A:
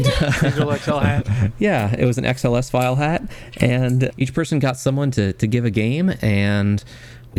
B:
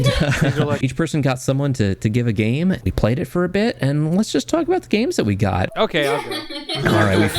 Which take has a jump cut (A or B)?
B